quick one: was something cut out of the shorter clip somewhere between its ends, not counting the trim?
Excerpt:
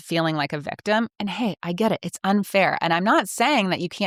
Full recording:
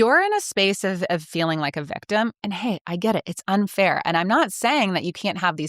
no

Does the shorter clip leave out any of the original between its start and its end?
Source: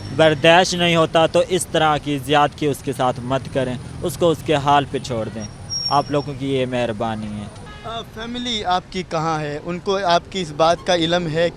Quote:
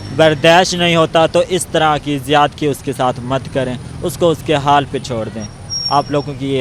no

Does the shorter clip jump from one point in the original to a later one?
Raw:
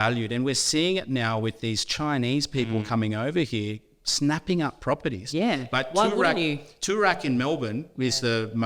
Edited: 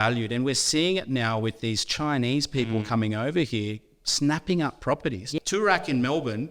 yes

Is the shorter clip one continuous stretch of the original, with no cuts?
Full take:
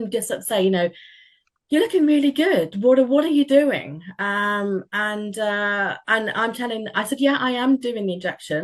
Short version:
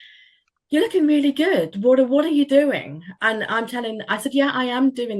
no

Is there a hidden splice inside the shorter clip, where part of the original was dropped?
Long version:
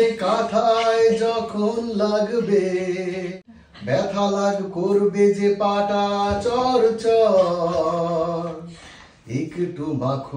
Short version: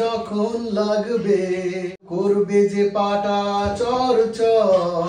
yes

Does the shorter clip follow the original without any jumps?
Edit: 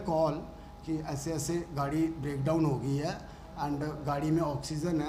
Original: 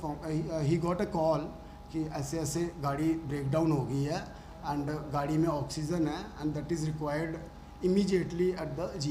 yes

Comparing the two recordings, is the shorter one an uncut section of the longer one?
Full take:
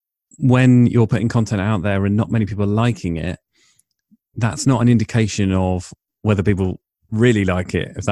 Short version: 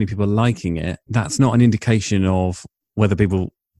no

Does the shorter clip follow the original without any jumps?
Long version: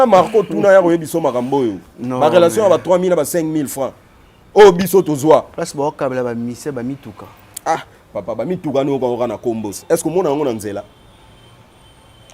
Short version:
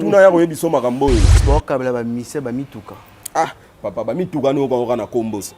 no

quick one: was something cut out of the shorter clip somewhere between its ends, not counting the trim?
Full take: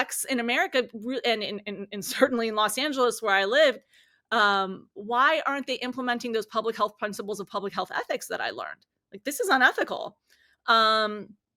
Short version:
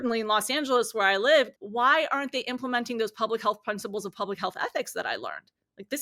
yes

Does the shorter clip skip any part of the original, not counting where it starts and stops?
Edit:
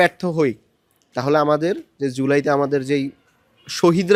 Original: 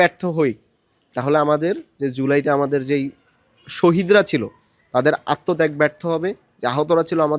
no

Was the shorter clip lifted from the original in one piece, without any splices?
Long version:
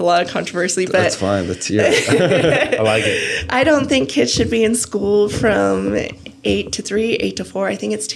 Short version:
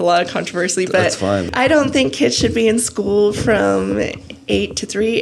no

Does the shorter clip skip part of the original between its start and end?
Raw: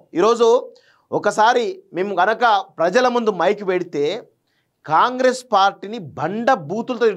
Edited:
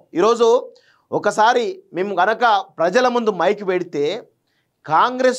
no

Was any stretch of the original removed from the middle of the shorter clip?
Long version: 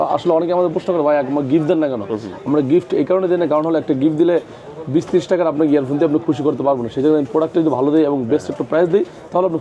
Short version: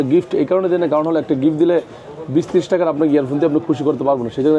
no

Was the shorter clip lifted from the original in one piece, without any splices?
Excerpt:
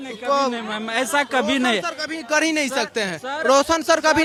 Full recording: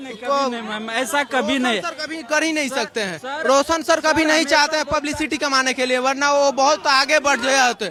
yes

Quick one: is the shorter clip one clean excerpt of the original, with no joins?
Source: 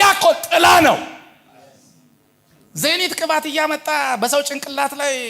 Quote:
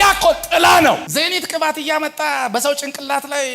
no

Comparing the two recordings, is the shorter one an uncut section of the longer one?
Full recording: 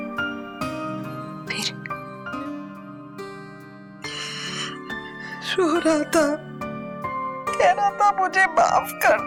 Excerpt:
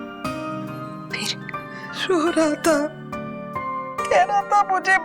no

